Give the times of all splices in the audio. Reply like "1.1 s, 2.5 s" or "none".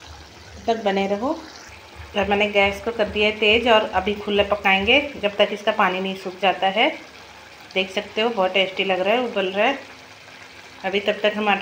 none